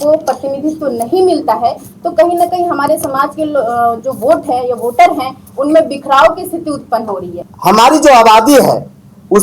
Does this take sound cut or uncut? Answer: cut